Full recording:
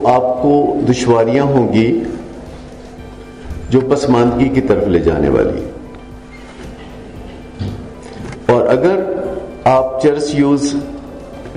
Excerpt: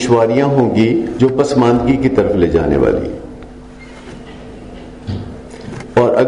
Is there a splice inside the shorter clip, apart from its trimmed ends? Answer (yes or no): yes